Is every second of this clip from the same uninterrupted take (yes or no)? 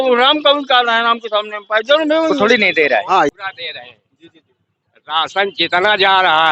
no